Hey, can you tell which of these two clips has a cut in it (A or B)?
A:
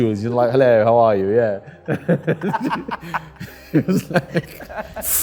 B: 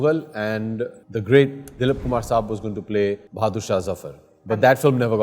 B